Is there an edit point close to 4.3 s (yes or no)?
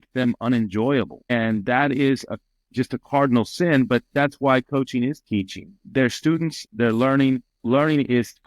no